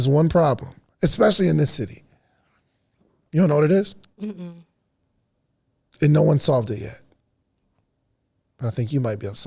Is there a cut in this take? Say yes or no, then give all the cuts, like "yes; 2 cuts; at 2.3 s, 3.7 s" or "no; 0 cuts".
no; 0 cuts